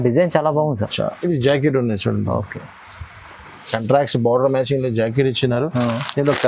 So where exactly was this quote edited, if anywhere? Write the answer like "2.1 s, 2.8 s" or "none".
none